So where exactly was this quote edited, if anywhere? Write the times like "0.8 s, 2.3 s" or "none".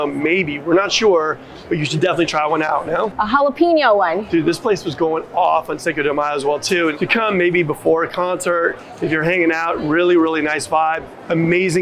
3.2 s, 4.2 s, 7.0 s

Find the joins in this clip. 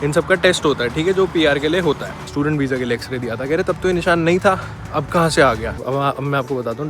2.1 s, 5.8 s

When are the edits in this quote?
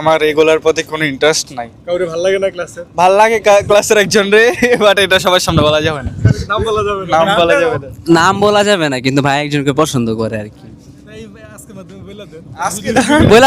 none

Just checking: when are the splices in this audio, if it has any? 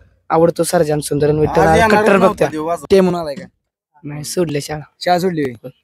2.9 s

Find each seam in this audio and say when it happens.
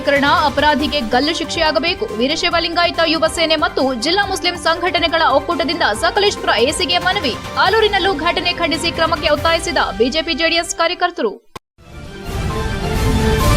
11.5 s

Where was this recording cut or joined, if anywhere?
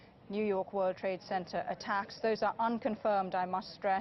none

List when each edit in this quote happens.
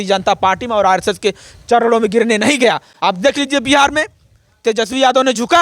none

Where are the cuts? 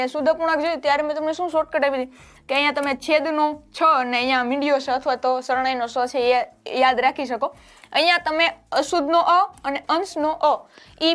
none

